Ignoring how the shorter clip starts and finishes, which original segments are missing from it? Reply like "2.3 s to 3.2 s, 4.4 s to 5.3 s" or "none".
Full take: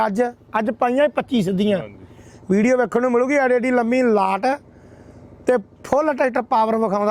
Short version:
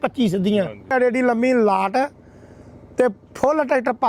2.1 s to 3.4 s